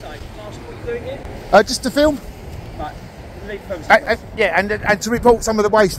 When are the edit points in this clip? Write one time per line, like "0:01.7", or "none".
none